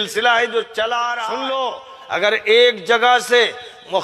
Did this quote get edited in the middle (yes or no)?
yes